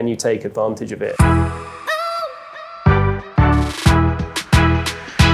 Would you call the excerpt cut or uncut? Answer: cut